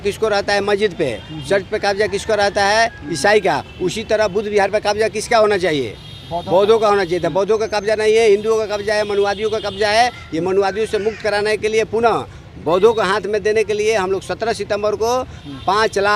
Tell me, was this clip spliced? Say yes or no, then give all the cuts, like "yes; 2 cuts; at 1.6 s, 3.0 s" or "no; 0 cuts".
no; 0 cuts